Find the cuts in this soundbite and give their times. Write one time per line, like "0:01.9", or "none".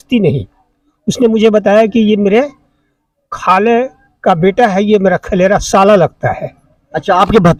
none